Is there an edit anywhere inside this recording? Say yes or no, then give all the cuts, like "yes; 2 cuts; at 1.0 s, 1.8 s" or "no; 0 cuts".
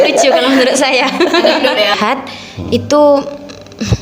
yes; 1 cut; at 2.0 s